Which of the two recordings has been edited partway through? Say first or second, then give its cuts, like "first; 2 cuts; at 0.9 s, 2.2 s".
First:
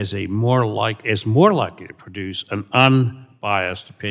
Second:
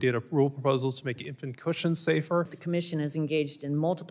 second; 1 cut; at 2.6 s